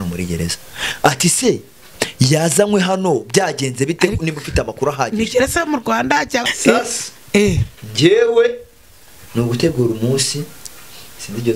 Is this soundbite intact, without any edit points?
no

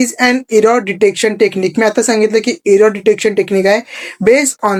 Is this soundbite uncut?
yes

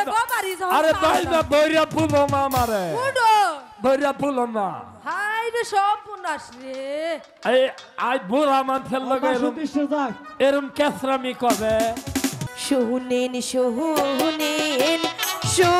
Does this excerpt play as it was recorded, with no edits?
no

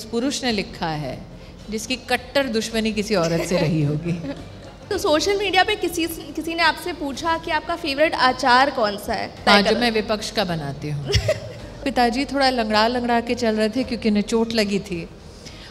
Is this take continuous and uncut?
no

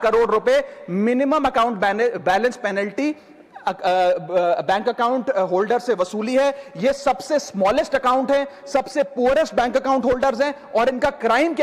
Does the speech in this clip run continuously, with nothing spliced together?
yes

